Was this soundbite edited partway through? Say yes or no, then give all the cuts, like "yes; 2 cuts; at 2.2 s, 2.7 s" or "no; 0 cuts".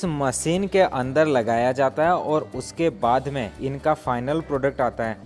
yes; 1 cut; at 3.5 s